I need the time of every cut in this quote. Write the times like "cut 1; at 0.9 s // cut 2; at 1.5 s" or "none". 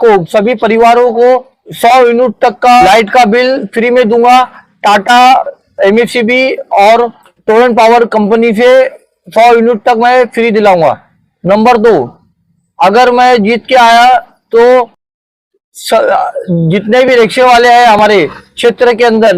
none